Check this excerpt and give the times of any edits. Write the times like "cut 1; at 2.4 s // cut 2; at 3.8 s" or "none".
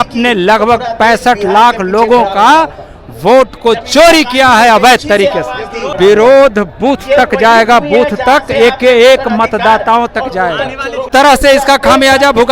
cut 1; at 5.9 s // cut 2; at 11.1 s